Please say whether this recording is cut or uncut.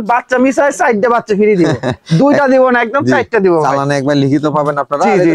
uncut